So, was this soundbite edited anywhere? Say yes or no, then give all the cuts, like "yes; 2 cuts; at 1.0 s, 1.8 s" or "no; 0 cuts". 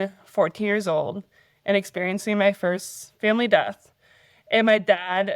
no; 0 cuts